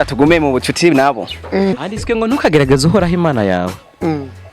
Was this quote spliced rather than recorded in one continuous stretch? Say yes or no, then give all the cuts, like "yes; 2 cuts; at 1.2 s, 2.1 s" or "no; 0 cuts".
yes; 1 cut; at 1.8 s